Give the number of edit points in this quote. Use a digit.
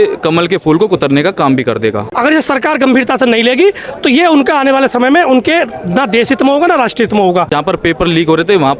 2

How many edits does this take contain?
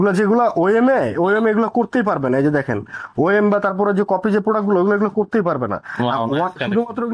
0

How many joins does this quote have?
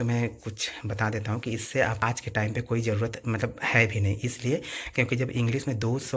1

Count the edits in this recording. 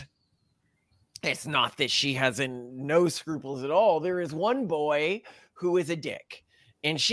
0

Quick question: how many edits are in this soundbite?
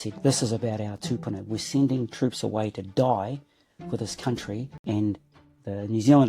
1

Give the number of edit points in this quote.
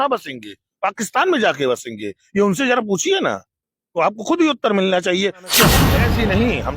1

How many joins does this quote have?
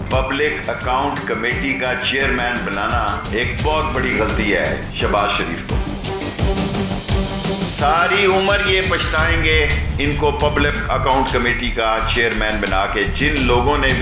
0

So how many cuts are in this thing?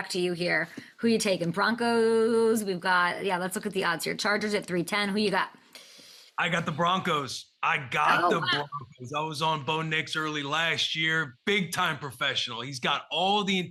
0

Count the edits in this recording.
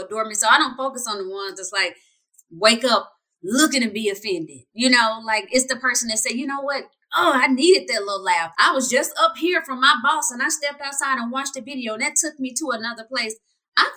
0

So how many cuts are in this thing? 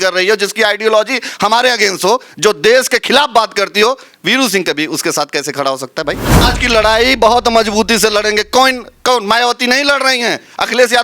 1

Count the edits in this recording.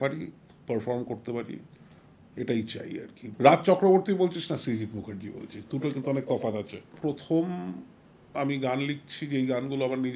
2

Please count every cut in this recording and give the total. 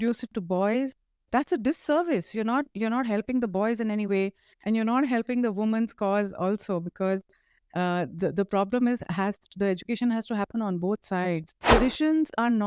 1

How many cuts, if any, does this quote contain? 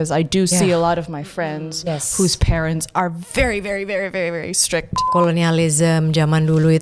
1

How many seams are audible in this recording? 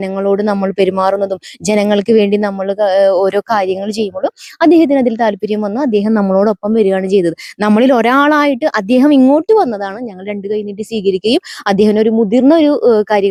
0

